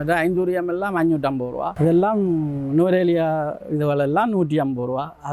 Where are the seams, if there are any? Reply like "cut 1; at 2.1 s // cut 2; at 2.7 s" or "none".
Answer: cut 1; at 1.7 s